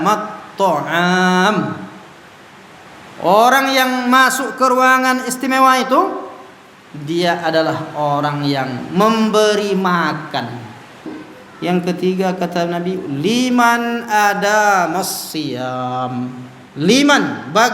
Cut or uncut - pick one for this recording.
cut